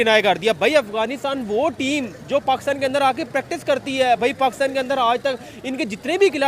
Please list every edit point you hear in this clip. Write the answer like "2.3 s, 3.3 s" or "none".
none